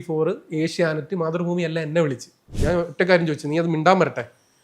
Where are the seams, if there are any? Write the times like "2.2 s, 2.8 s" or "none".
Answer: 2.5 s